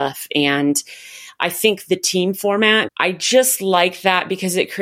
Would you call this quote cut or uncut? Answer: cut